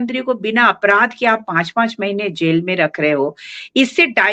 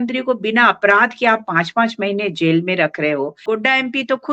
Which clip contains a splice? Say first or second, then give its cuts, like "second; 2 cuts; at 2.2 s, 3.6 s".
second; 1 cut; at 3.4 s